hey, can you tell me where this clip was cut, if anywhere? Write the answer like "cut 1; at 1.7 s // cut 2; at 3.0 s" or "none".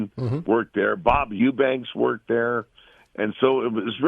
cut 1; at 1.3 s